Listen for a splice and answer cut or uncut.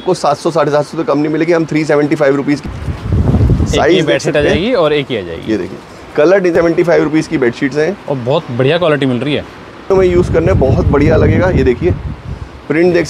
cut